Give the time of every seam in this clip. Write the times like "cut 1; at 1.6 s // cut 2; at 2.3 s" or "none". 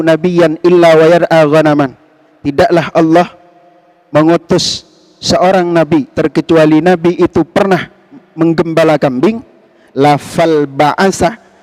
none

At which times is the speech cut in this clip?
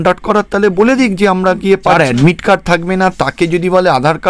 cut 1; at 2.0 s

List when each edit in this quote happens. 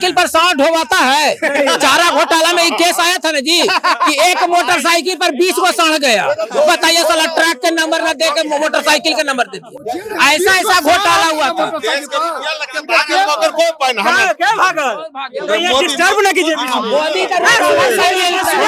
none

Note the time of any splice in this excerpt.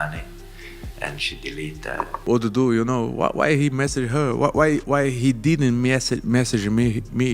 cut 1; at 2.2 s

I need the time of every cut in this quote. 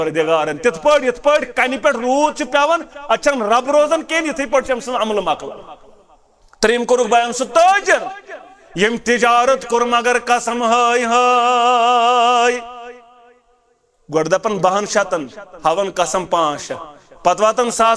none

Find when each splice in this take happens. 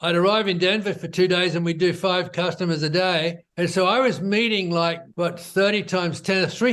cut 1; at 3.4 s // cut 2; at 5.1 s

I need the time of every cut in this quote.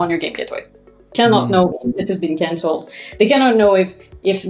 cut 1; at 1.1 s

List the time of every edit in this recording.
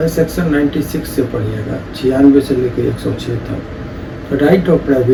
none

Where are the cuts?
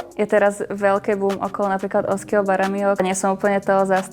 cut 1; at 3.0 s

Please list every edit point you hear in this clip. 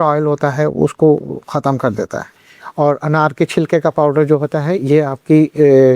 cut 1; at 2.2 s

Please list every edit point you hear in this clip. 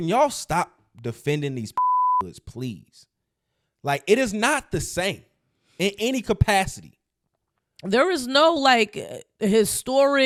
none

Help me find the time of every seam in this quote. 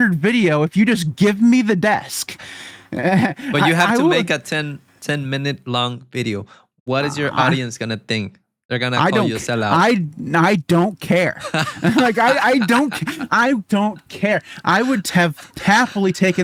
none

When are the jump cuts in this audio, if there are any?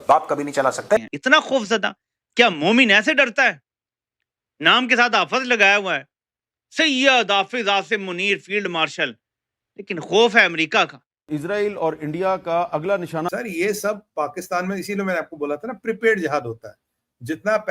cut 1; at 1.1 s // cut 2; at 11.1 s // cut 3; at 13.3 s

